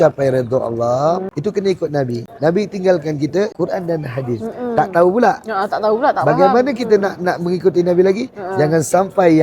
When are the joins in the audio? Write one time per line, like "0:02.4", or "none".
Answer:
0:01.3
0:02.2
0:03.5